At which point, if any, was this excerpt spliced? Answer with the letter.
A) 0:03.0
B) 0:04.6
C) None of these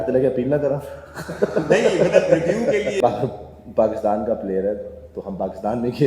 A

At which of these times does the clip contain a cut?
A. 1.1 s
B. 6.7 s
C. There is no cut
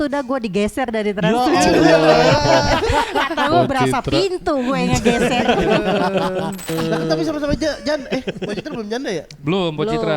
B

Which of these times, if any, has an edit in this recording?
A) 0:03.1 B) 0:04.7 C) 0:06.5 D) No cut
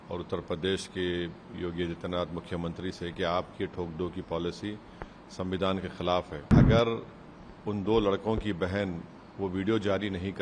C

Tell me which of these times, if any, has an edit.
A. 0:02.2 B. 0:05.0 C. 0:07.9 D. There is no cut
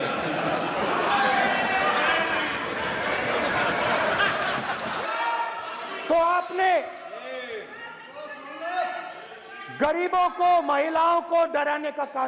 B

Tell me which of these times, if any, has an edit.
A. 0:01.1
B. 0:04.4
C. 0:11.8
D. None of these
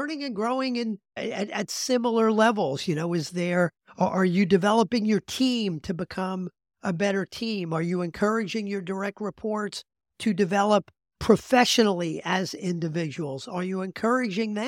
A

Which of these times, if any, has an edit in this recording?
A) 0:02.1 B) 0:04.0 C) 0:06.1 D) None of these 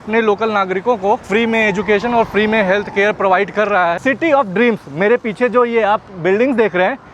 B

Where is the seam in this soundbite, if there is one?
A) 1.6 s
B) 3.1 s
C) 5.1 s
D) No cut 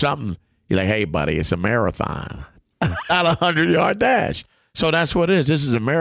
B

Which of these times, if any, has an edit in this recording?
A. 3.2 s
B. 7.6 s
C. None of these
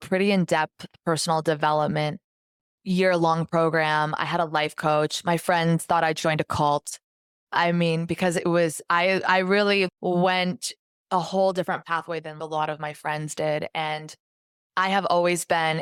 C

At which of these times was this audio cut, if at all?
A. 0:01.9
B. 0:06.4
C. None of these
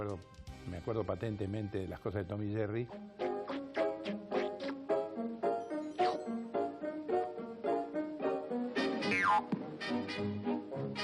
A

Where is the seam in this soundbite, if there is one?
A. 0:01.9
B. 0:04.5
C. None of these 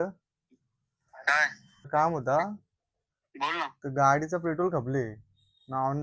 A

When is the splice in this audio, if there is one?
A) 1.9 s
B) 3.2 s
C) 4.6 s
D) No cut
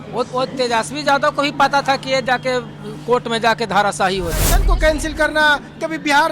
C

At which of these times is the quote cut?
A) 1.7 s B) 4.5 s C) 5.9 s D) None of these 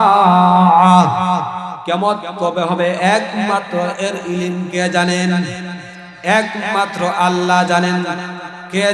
A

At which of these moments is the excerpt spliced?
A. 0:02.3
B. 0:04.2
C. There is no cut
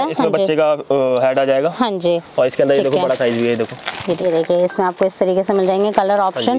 B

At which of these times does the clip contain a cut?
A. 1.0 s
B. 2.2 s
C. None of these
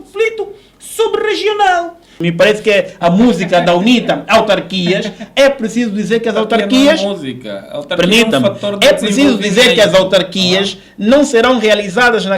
B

